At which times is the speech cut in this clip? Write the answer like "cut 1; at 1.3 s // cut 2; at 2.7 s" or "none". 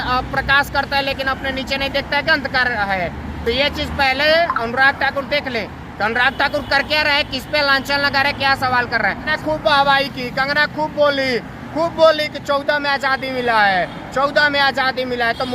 cut 1; at 9.3 s